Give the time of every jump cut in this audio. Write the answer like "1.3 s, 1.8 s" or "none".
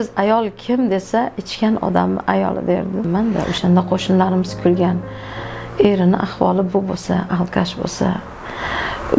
3.1 s